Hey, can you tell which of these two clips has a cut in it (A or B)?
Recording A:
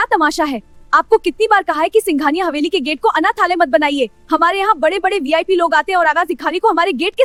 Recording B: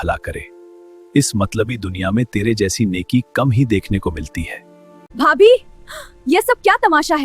B